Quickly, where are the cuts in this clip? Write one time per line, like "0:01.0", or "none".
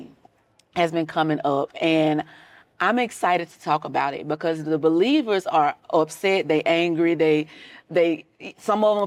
none